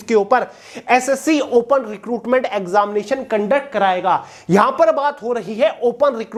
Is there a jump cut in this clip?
no; 0 cuts

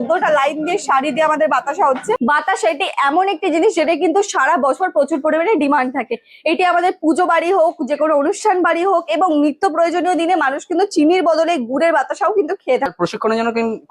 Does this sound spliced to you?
yes; 2 cuts; at 2.2 s, 12.9 s

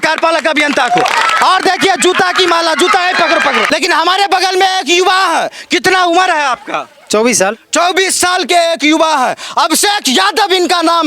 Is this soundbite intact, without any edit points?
no; 1 cut; at 3.6 s

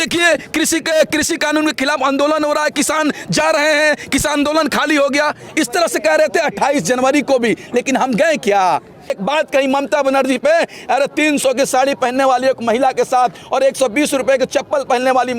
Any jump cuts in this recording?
yes; 1 cut; at 9.1 s

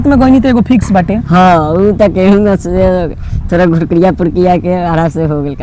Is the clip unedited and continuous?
yes; 0 cuts

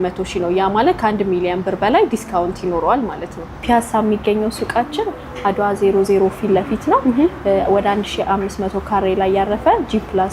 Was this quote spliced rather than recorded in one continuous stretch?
yes; 1 cut; at 3.5 s

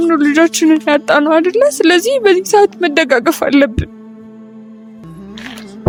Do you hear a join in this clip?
no; 0 cuts

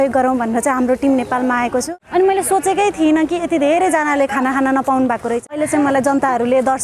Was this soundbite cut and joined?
yes; 2 cuts; at 1.9 s, 5.5 s

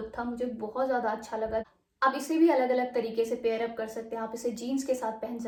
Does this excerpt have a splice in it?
no; 0 cuts

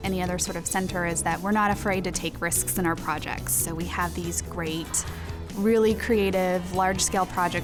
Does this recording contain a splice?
no; 0 cuts

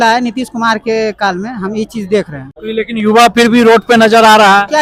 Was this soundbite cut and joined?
no; 0 cuts

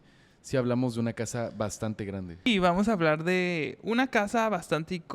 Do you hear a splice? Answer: yes; 1 cut; at 2.5 s

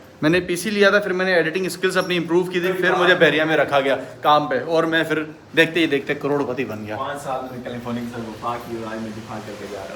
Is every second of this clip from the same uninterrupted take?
yes; 0 cuts

